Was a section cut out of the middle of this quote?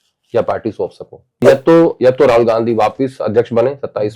yes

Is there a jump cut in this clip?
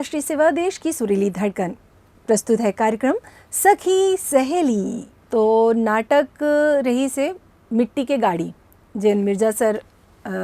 yes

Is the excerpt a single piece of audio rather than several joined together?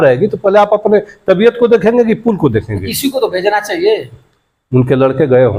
yes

